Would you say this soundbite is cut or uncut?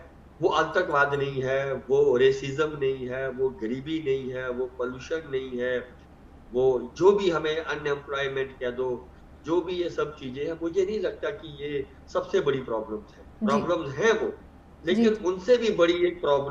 uncut